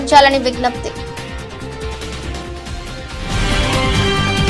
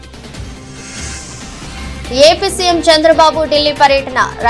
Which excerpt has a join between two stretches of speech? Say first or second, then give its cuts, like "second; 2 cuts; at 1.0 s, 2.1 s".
first; 1 cut; at 1.8 s